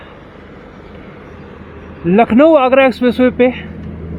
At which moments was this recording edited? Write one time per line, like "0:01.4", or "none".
none